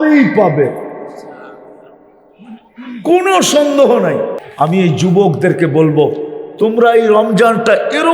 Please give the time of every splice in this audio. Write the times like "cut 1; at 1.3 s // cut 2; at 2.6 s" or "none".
cut 1; at 4.4 s